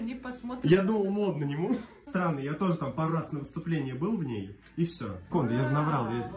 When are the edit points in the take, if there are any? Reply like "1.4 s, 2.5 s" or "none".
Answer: 2.0 s, 5.3 s

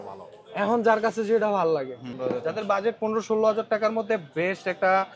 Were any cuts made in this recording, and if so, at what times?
2.1 s

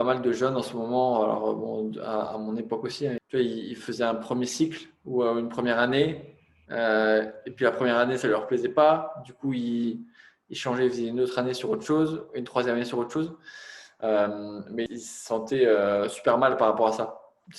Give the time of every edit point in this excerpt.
3.2 s, 14.9 s

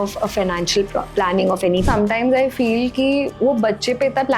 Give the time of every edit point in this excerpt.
1.8 s

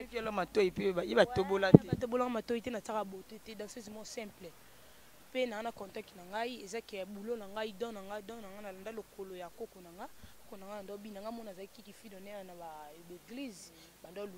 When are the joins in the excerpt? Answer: none

